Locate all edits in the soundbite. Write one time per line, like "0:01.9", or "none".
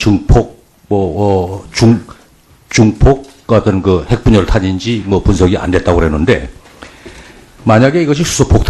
none